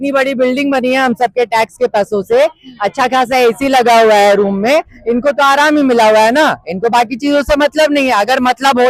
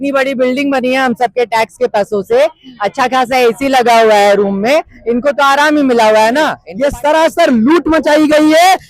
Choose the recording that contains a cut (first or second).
second